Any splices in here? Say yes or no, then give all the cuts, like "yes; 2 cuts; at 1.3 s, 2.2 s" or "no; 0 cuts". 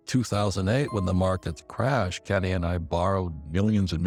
no; 0 cuts